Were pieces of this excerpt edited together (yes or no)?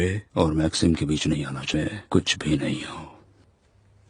yes